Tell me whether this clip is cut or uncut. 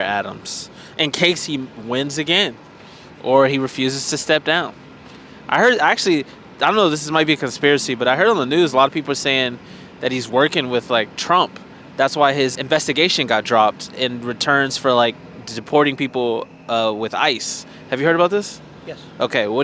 cut